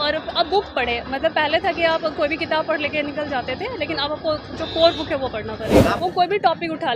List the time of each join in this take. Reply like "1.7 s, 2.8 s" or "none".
6.0 s